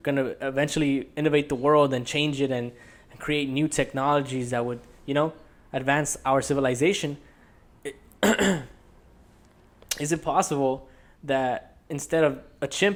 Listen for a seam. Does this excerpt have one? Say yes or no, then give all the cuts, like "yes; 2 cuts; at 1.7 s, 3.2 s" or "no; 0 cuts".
no; 0 cuts